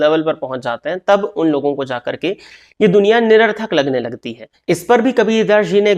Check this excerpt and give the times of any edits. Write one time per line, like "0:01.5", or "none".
0:04.6